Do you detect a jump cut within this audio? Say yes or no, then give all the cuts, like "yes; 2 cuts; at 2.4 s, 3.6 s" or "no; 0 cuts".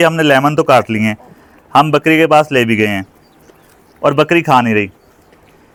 no; 0 cuts